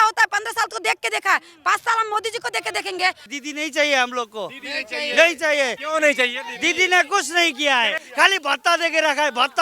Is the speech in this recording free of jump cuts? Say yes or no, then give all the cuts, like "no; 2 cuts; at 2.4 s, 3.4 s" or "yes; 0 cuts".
no; 2 cuts; at 3.3 s, 7.9 s